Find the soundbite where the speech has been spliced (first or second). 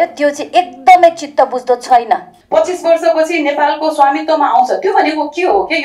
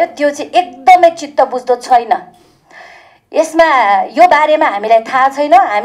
first